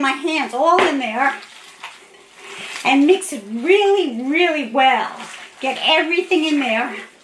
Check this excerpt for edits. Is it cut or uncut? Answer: uncut